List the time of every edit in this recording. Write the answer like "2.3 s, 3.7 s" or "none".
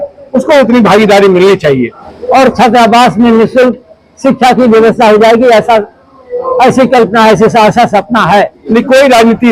2.1 s, 8.6 s